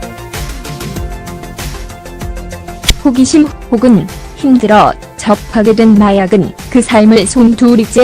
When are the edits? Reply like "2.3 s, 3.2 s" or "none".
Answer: 5.8 s